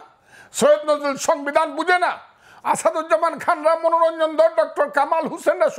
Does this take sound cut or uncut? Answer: uncut